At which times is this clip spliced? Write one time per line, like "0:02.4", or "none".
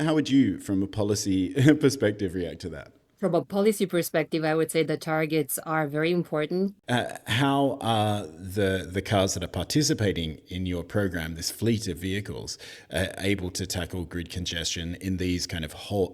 0:06.7